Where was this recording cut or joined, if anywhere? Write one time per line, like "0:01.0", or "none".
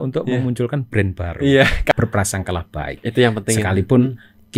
0:01.9